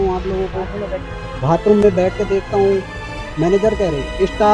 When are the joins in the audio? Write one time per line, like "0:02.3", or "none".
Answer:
none